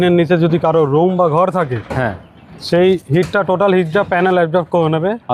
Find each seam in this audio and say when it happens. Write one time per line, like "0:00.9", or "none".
none